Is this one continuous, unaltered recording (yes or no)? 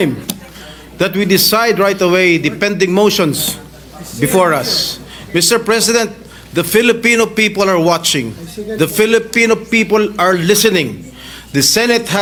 yes